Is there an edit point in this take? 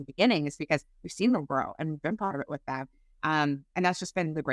no; 0 cuts

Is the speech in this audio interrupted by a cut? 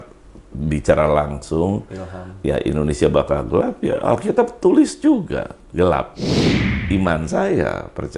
yes; 2 cuts; at 5.6 s, 6.6 s

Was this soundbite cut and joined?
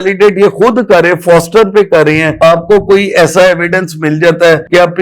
yes; 1 cut; at 2.3 s

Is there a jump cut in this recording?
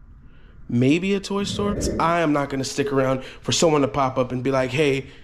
yes; 1 cut; at 1.9 s

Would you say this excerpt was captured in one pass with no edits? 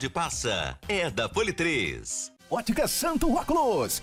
yes; 0 cuts

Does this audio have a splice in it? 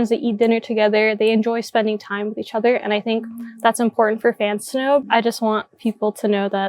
yes; 1 cut; at 5.0 s

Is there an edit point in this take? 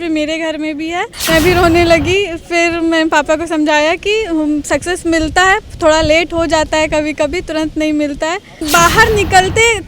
yes; 2 cuts; at 1.2 s, 8.6 s

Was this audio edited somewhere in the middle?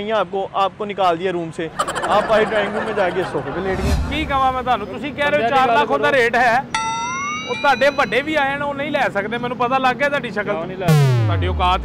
yes; 1 cut; at 4.0 s

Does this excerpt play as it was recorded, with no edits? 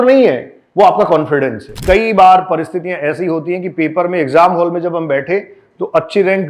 no; 1 cut; at 1.8 s

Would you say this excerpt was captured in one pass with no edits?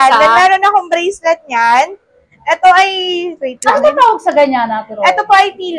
yes; 0 cuts

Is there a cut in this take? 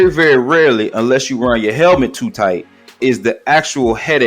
yes; 1 cut; at 3.0 s

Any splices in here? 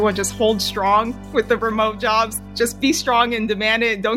yes; 2 cuts; at 1.2 s, 2.4 s

